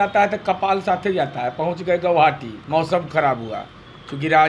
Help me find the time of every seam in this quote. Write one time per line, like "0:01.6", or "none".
0:02.5